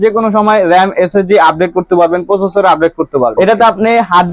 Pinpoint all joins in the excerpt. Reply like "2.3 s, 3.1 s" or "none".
3.3 s

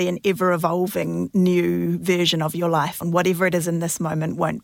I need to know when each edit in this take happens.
3.0 s

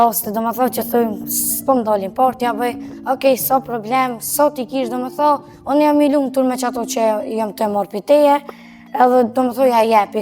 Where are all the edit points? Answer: none

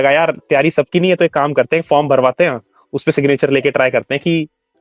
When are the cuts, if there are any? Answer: none

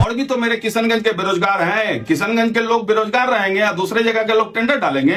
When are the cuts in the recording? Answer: none

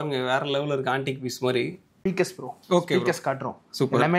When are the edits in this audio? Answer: 2.4 s

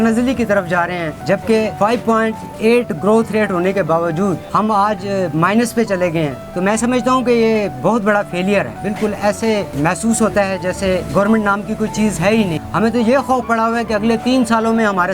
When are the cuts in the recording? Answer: 1.5 s, 4.4 s, 6.4 s, 8.8 s, 9.7 s, 11.1 s, 12.6 s

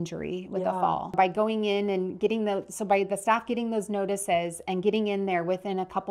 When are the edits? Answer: 1.1 s

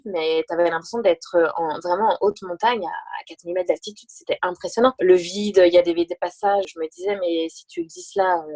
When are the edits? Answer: 5.0 s, 6.7 s

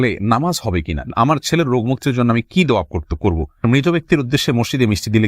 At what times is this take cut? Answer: 1.1 s, 3.6 s

